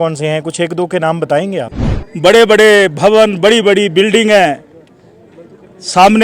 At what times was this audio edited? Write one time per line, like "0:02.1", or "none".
0:01.7